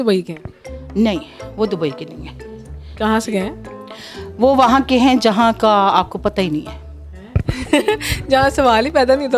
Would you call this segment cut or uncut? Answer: uncut